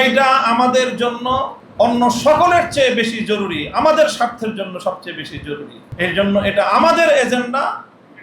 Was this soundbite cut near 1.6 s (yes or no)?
yes